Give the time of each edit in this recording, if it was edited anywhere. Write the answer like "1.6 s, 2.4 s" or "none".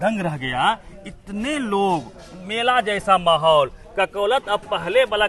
none